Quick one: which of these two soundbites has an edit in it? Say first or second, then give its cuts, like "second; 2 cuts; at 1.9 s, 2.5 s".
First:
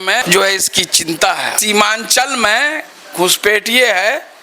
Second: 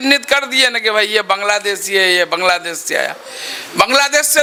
first; 1 cut; at 1.6 s